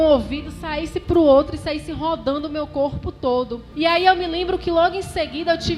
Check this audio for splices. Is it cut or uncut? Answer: cut